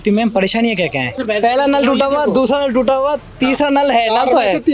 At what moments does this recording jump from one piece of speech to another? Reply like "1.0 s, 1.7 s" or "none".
1.1 s